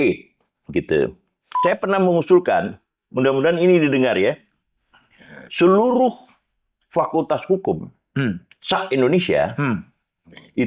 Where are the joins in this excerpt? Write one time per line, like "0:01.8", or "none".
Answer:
0:01.6